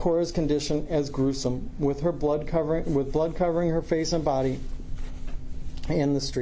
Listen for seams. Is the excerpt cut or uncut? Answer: uncut